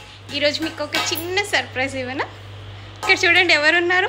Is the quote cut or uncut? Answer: uncut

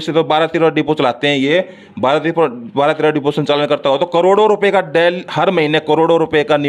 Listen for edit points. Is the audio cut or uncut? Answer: uncut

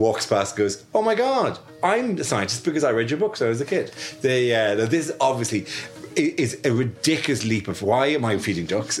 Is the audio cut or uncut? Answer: uncut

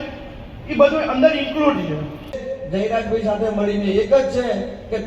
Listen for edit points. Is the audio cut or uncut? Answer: cut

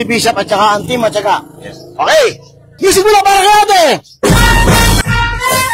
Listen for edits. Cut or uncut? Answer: uncut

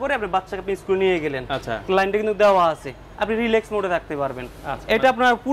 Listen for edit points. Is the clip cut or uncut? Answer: uncut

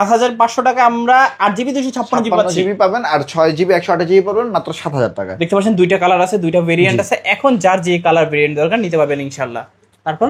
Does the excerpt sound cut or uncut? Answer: uncut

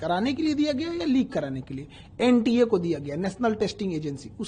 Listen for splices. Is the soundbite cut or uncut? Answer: uncut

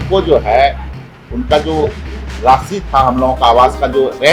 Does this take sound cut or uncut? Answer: uncut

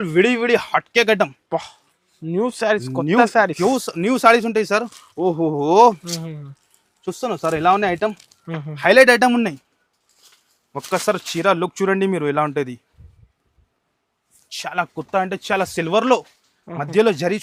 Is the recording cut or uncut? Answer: uncut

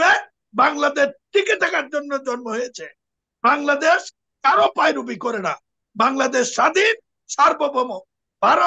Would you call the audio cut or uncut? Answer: uncut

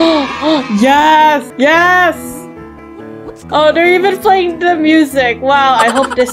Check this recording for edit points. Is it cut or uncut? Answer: uncut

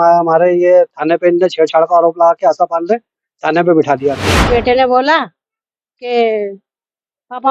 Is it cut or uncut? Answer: cut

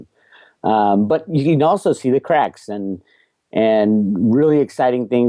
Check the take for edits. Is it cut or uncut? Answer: uncut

